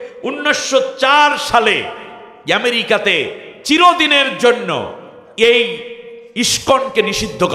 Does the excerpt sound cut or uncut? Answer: uncut